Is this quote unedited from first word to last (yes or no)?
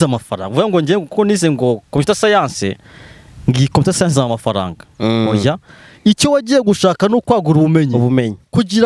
yes